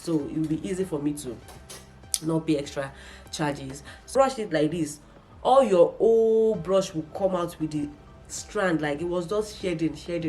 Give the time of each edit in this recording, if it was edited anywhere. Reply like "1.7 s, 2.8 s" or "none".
4.1 s